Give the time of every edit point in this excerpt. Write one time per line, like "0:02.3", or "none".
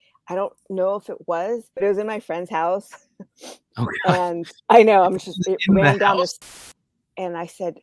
0:01.7
0:06.4